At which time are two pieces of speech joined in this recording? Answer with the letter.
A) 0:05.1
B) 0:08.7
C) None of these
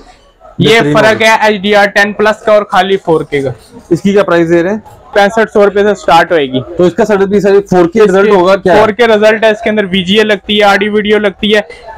A